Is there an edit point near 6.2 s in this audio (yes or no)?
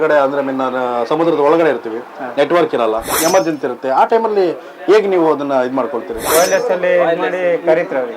yes